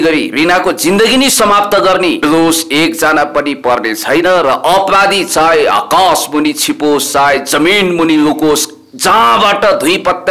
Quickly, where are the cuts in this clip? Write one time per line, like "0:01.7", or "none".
0:02.2